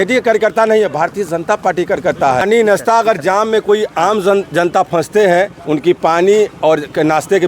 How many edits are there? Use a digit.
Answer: 1